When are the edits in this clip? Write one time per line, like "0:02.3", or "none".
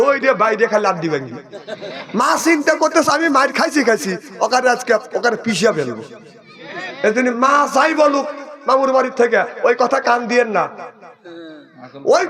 none